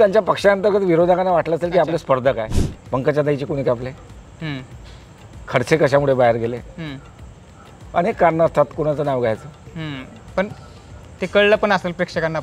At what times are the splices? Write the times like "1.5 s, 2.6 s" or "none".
2.5 s